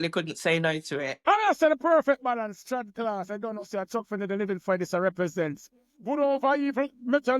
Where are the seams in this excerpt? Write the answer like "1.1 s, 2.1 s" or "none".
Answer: 1.1 s